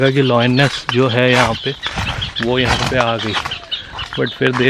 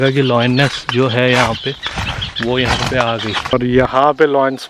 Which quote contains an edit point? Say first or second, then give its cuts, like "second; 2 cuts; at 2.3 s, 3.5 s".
second; 1 cut; at 3.5 s